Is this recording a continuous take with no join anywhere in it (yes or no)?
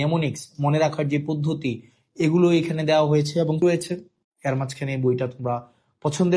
no